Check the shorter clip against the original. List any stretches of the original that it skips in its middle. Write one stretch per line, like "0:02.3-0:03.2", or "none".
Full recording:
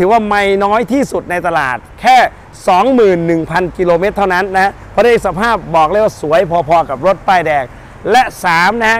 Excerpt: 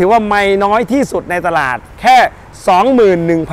none